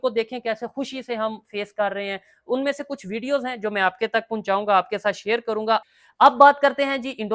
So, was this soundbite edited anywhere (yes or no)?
yes